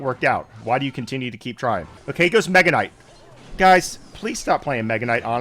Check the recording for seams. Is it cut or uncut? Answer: cut